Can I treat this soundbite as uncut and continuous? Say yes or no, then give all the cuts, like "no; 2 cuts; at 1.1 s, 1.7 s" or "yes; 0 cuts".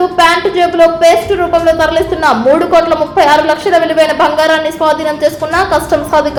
yes; 0 cuts